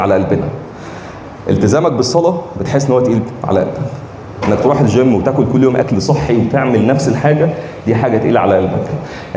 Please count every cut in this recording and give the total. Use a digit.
0